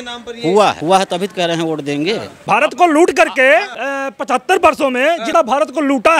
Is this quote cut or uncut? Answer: cut